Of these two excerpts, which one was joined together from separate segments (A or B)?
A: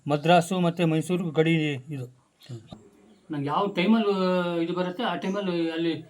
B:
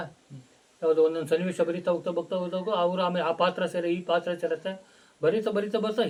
A